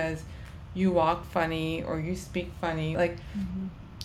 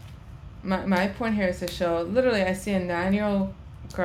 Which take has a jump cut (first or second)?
first